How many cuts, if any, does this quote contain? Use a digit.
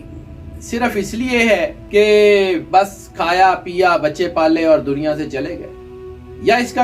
2